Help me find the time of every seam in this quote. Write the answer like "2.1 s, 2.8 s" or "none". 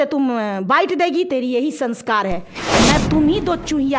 3.0 s

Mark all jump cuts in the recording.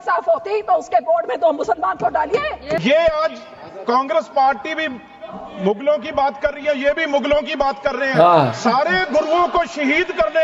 2.8 s

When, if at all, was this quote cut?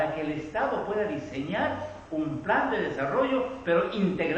none

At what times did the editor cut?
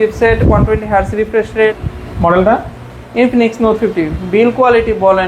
1.9 s

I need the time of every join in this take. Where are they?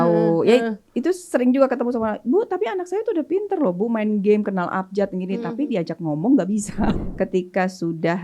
7.0 s

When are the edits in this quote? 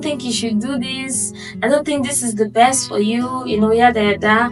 none

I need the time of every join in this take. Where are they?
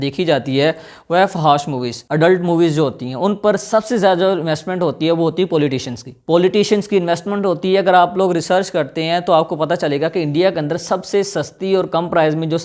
none

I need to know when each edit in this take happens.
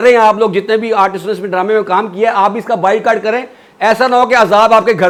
none

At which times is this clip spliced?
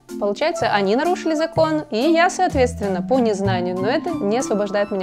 4.1 s

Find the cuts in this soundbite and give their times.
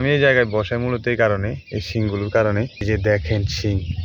2.8 s

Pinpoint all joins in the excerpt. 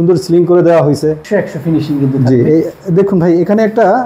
1.2 s

